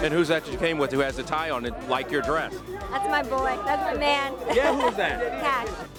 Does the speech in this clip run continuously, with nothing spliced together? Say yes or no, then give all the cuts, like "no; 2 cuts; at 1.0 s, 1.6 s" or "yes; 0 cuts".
yes; 0 cuts